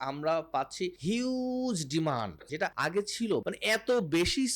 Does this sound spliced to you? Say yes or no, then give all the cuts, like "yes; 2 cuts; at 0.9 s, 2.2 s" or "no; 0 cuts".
yes; 3 cuts; at 1.0 s, 2.8 s, 3.4 s